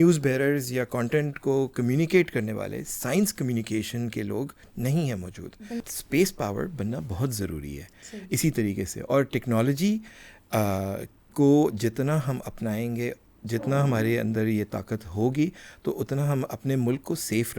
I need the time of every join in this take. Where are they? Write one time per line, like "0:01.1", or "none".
0:05.9